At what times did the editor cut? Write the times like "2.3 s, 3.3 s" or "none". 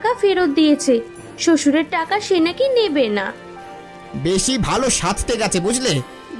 none